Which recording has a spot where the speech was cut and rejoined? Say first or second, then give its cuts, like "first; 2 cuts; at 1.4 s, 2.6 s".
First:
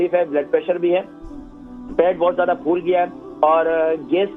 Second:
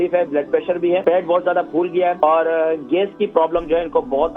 second; 2 cuts; at 1.0 s, 2.2 s